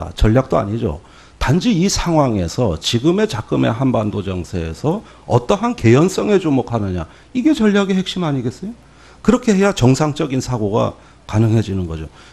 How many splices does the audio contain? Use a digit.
1